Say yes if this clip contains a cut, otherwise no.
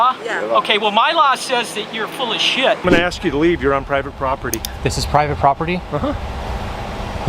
yes